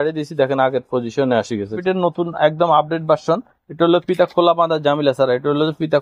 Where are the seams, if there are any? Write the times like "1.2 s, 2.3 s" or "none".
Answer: 1.8 s